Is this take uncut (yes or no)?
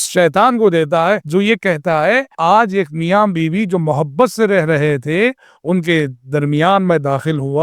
no